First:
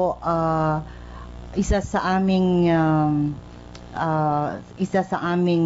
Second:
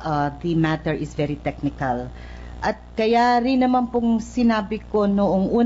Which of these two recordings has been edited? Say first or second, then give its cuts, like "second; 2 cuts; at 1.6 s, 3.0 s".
second; 1 cut; at 3.8 s